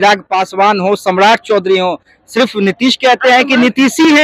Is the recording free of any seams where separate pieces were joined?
yes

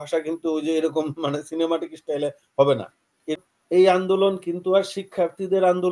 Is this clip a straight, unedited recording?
no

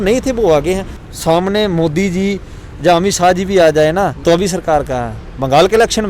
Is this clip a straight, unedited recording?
no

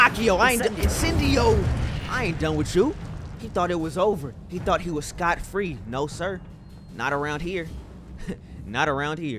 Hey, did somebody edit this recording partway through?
no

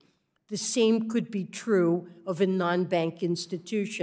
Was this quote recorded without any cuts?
yes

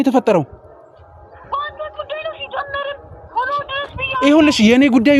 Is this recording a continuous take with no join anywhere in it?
yes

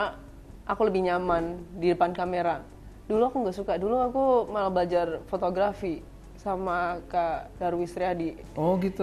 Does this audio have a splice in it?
no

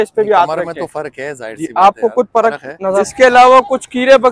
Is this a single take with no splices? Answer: no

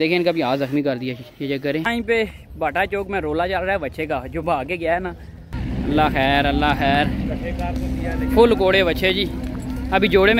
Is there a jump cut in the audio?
yes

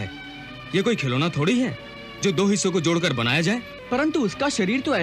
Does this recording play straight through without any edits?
no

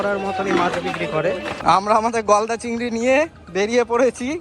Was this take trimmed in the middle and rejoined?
yes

